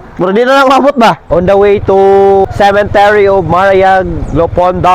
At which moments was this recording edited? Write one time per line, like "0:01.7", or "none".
0:01.2